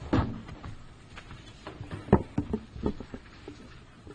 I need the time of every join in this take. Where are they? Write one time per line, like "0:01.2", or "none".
0:02.4

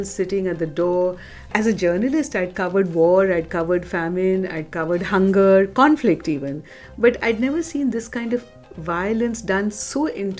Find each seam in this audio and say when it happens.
0:01.5

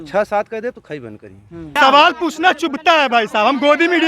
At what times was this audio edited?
0:01.7

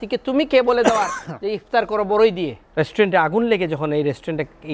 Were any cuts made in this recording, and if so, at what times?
0:02.6

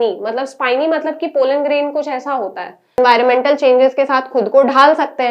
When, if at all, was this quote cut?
0:03.0

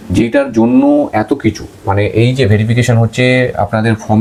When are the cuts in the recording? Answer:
none

